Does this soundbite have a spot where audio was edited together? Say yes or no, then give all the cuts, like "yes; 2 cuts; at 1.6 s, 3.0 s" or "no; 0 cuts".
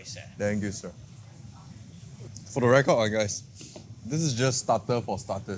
yes; 1 cut; at 2.3 s